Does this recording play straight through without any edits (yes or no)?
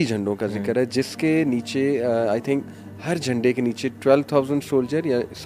yes